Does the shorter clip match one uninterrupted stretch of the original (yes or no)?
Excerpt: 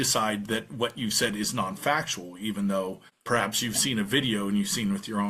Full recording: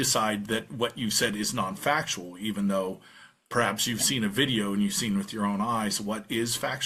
no